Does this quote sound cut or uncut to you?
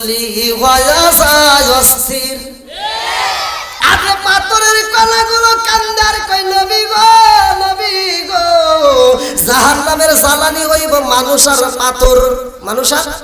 cut